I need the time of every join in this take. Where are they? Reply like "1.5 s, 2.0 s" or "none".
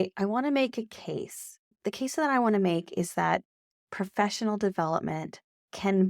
1.8 s